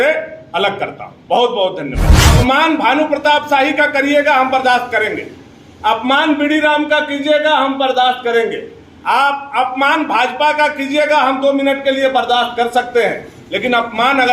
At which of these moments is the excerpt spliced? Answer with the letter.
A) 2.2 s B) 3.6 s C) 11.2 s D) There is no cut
A